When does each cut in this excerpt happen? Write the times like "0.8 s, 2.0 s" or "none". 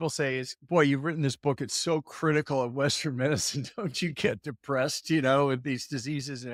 none